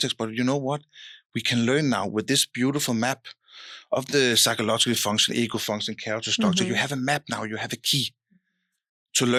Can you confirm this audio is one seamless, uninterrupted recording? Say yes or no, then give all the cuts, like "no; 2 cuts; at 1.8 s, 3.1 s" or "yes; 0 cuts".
yes; 0 cuts